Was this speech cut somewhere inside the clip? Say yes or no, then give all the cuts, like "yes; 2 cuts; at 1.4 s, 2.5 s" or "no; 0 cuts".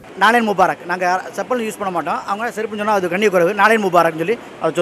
no; 0 cuts